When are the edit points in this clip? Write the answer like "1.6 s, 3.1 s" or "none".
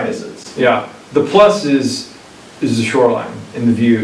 none